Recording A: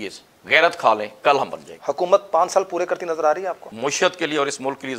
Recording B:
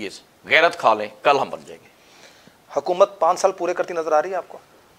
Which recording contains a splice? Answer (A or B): A